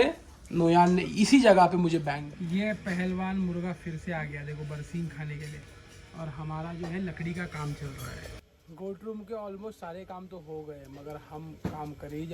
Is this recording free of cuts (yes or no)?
yes